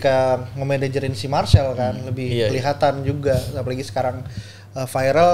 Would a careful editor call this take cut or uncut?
uncut